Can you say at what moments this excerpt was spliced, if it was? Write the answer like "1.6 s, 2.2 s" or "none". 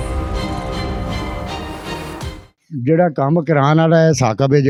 none